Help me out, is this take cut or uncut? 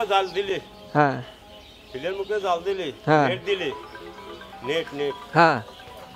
uncut